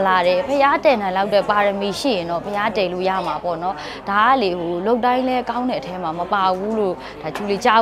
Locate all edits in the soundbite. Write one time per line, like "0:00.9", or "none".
none